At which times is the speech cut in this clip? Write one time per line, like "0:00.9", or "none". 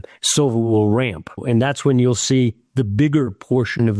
0:01.4